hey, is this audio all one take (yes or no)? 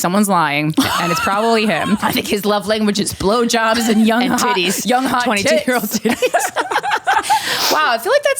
no